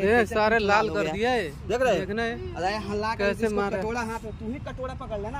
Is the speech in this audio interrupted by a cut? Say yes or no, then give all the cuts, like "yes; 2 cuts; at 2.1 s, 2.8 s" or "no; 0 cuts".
no; 0 cuts